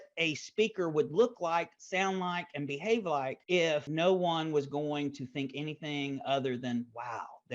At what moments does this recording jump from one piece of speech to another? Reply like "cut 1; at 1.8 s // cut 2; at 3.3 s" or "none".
cut 1; at 3.7 s